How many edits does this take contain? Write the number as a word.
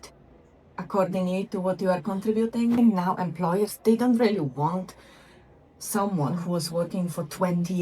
one